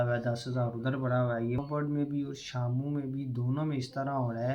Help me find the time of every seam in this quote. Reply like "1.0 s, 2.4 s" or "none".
1.6 s